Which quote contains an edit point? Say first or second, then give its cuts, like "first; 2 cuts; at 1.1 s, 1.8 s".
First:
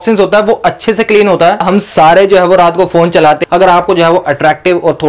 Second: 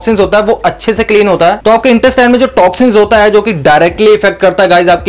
first; 2 cuts; at 1.6 s, 3.4 s